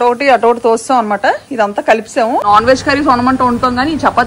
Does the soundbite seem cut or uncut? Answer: cut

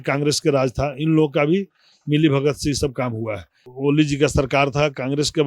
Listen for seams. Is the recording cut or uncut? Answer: cut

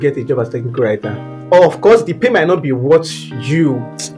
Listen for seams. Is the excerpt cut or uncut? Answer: uncut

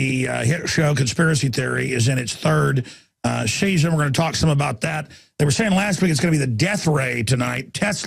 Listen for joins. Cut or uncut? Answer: uncut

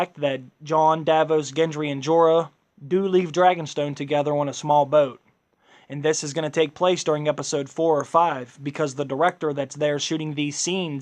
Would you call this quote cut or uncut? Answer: cut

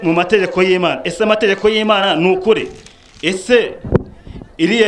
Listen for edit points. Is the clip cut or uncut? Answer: uncut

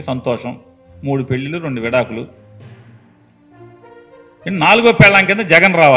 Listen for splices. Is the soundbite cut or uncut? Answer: uncut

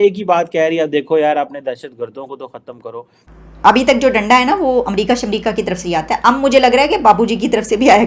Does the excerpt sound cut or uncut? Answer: cut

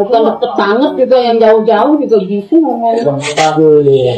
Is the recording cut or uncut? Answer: uncut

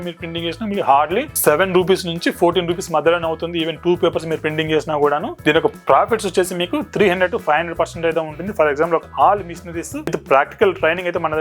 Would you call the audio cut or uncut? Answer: cut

